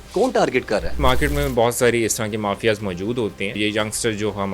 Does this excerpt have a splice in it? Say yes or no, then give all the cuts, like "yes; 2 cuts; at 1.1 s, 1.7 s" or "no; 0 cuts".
yes; 2 cuts; at 1.0 s, 3.6 s